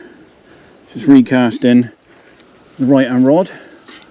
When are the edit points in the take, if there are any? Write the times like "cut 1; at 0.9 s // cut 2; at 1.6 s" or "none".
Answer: none

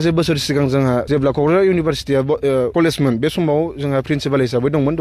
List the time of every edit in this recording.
cut 1; at 1.1 s // cut 2; at 2.7 s

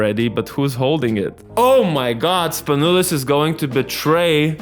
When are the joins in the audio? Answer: cut 1; at 1.4 s

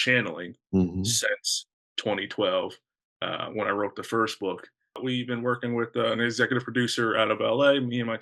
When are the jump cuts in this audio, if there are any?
cut 1; at 5.0 s

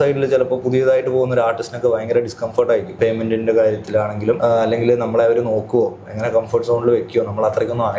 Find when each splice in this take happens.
cut 1; at 3.0 s // cut 2; at 4.4 s

